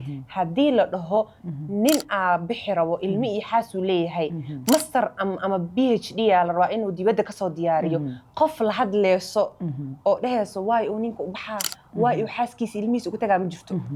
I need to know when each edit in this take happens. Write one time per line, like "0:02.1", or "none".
none